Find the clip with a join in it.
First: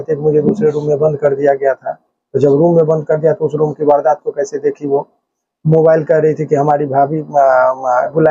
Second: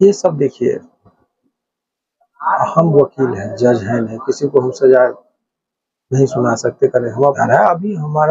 second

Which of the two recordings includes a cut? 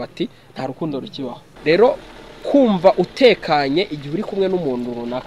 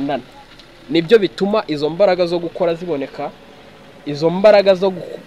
first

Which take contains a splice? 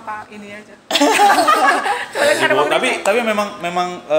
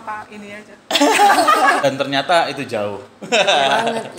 second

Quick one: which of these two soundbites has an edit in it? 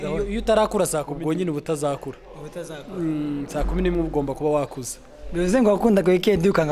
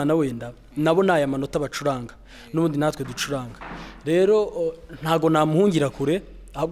first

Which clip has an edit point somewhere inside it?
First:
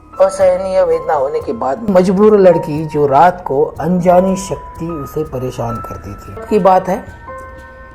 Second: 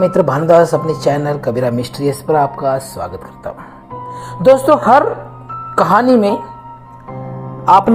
first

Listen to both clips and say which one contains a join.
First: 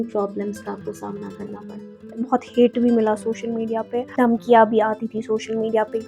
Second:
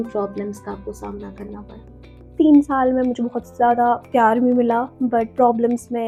first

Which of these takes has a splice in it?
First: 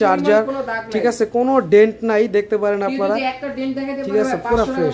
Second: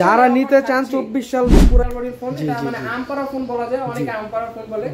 second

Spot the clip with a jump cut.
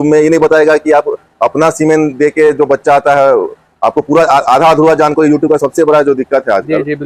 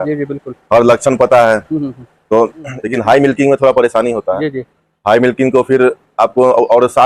second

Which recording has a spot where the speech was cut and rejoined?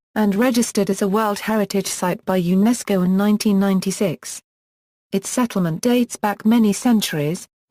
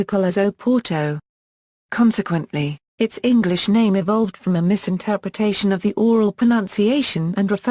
second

